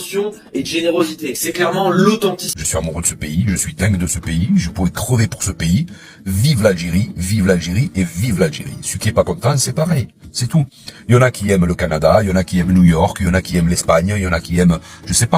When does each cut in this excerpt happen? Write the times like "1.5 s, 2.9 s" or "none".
2.5 s